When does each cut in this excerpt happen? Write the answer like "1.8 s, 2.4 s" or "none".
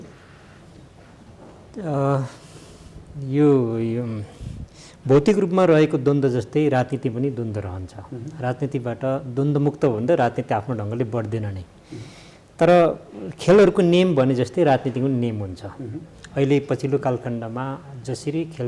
none